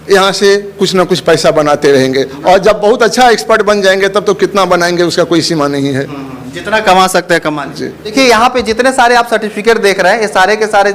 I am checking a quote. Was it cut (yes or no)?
yes